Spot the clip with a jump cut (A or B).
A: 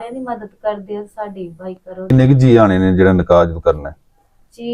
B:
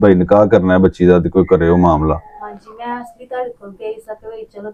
A